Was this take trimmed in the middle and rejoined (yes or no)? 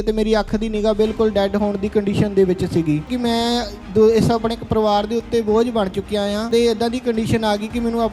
yes